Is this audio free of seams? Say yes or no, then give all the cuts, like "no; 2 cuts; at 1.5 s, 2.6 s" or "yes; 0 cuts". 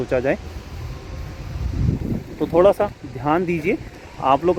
yes; 0 cuts